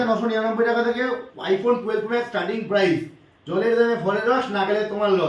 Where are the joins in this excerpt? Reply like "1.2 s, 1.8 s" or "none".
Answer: none